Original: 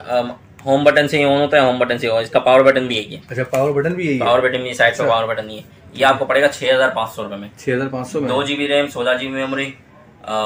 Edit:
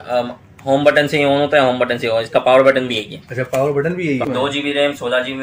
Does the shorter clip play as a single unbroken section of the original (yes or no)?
no